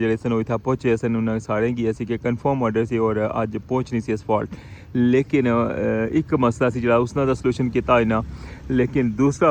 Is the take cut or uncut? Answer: uncut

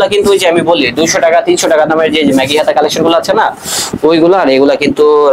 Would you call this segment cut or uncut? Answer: uncut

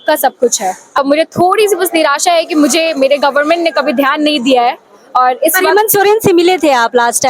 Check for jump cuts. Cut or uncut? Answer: cut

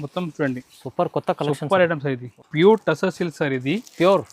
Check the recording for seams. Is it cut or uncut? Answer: cut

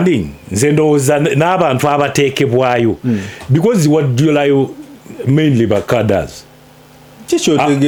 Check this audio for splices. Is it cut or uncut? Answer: uncut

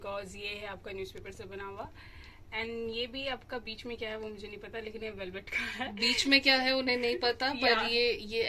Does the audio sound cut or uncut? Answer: uncut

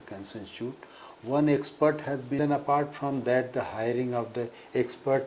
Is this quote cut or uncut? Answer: cut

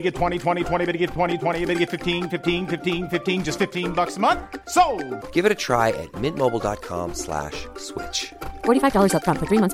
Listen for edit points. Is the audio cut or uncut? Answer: uncut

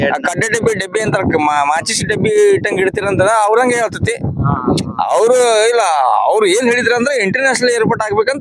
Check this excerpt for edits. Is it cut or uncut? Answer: uncut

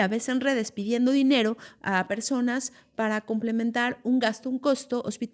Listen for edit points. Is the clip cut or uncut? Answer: uncut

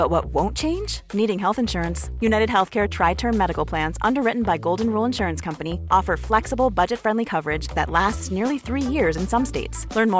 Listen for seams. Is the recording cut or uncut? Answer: uncut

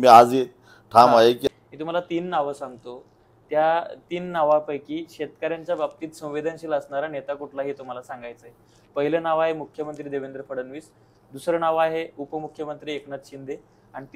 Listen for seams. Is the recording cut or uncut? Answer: cut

